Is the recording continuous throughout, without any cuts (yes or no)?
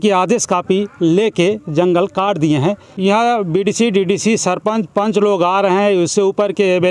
no